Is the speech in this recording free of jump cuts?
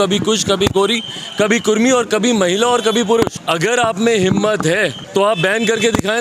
no; 2 cuts; at 3.4 s, 5.0 s

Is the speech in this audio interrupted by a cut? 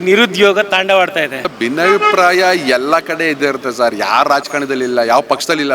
yes; 1 cut; at 1.5 s

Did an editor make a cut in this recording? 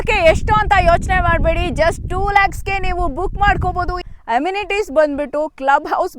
yes; 1 cut; at 4.1 s

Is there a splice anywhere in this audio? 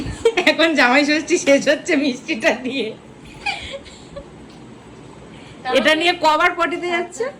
no; 0 cuts

